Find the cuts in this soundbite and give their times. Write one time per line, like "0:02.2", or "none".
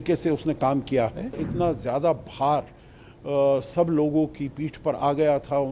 0:01.4